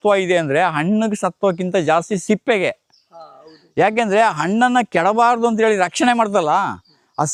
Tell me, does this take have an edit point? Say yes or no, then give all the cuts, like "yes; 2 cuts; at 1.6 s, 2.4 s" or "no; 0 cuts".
no; 0 cuts